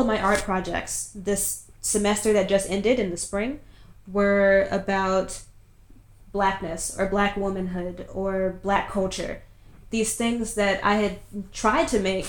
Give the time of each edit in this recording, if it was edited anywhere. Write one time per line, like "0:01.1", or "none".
none